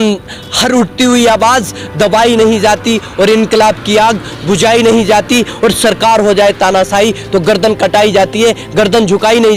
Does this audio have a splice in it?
no; 0 cuts

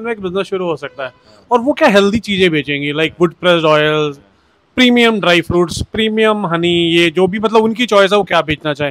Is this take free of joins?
yes; 0 cuts

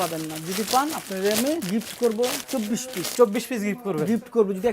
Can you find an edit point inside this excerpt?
yes; 2 cuts; at 1.6 s, 2.6 s

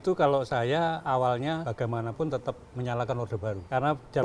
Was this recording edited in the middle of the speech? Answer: no; 0 cuts

